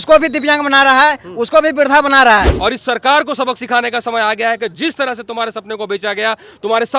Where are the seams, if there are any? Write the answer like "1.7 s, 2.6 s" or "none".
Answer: 2.5 s